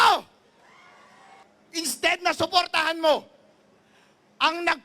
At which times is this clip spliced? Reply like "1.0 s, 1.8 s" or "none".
1.4 s